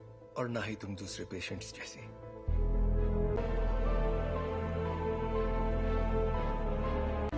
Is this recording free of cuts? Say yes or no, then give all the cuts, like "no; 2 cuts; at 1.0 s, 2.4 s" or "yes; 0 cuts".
no; 1 cut; at 3.4 s